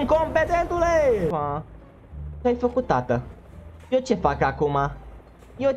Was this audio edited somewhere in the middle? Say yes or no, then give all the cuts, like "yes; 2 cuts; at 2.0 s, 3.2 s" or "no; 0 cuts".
yes; 1 cut; at 1.3 s